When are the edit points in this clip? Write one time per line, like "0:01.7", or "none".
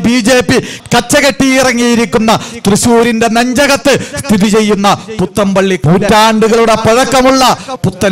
0:05.8